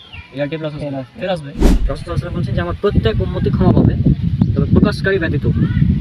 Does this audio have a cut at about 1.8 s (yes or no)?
yes